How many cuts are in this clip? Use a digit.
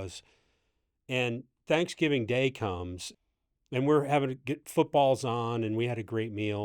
1